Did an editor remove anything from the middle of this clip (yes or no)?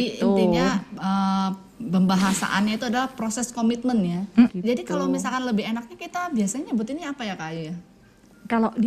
yes